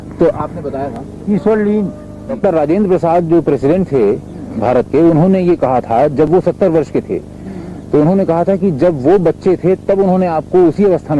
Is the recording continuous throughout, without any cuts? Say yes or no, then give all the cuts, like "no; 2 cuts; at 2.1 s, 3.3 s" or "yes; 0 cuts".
no; 1 cut; at 2.4 s